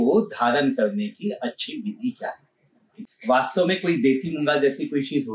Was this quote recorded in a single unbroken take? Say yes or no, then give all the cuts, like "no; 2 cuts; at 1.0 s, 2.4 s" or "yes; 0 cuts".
no; 1 cut; at 2.9 s